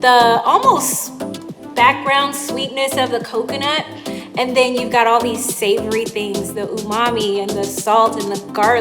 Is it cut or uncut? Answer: cut